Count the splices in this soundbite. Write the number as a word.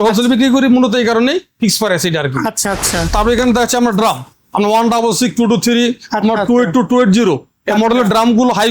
one